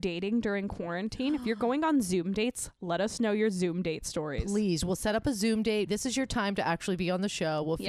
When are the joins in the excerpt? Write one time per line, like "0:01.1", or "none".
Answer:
none